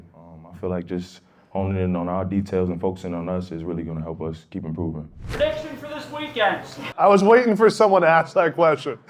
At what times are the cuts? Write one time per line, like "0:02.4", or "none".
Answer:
0:05.2
0:06.9